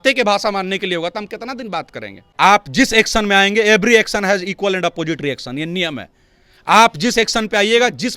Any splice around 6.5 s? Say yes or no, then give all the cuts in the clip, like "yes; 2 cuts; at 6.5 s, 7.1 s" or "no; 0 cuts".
no; 1 cut; at 2.3 s